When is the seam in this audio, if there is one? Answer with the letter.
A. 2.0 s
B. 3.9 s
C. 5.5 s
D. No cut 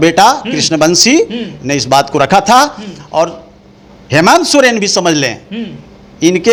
D